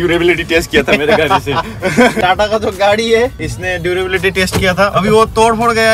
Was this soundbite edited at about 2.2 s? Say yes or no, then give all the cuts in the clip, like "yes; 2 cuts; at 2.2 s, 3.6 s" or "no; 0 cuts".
yes; 1 cut; at 2.2 s